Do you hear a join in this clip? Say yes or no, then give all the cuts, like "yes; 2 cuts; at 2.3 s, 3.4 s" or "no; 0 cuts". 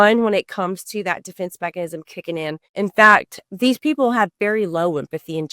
yes; 2 cuts; at 2.6 s, 3.4 s